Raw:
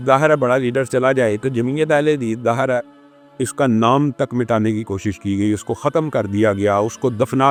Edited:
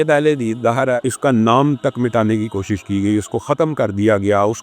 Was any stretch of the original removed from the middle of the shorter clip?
yes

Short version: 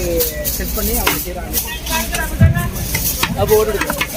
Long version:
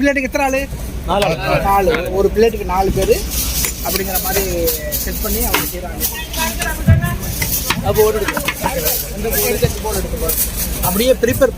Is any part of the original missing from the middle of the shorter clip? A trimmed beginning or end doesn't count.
no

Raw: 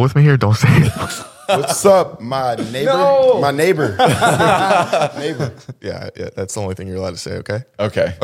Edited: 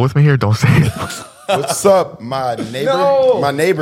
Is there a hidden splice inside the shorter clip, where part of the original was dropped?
no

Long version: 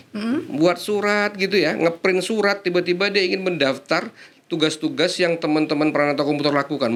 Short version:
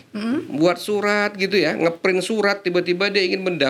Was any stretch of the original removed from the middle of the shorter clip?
no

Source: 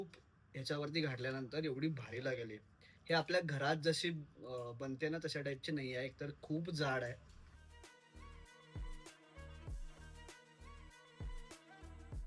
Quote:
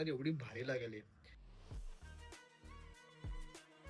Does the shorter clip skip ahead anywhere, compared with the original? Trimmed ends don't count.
yes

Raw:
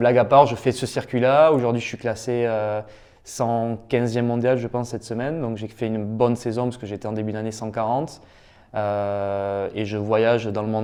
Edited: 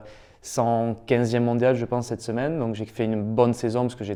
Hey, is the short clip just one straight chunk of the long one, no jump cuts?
yes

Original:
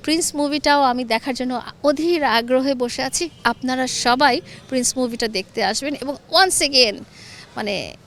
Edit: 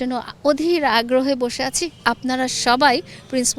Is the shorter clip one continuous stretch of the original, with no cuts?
yes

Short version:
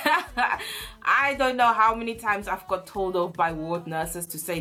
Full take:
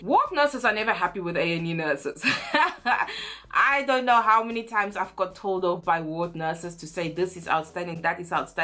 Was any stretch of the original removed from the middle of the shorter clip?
no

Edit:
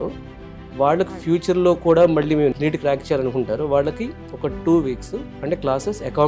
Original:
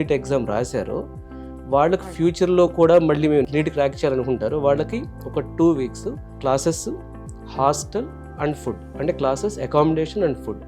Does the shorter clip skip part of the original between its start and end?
yes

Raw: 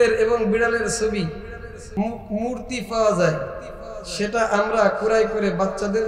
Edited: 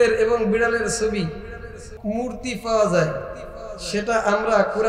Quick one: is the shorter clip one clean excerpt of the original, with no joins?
no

